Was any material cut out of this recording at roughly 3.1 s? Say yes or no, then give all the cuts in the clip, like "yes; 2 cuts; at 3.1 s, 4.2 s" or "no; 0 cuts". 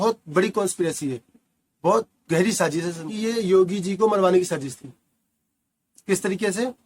yes; 1 cut; at 3.1 s